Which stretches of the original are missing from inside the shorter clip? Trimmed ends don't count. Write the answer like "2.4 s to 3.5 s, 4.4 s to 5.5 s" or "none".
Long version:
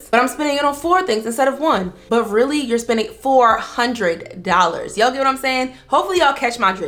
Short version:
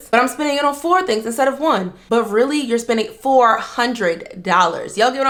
none